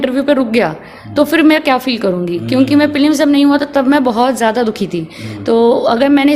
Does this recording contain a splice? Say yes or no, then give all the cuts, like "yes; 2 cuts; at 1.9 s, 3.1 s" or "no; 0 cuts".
no; 0 cuts